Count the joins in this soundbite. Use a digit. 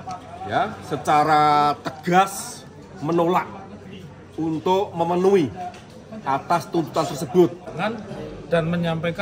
1